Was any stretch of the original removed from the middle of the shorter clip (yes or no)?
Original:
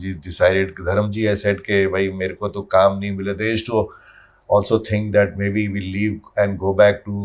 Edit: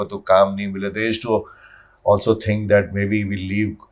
no